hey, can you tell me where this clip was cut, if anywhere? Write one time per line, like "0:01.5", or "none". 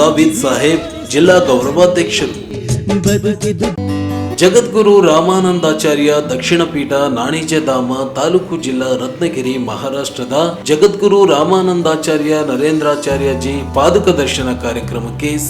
0:03.8